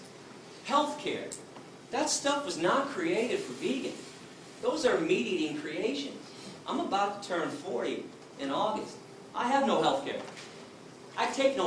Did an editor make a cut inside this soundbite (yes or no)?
no